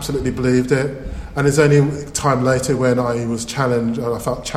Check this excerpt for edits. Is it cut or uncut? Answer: uncut